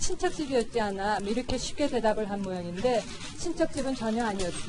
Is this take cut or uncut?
cut